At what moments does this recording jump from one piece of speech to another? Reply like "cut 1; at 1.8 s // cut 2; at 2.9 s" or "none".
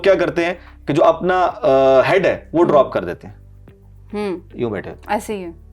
none